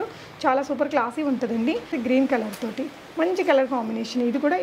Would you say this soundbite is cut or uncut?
cut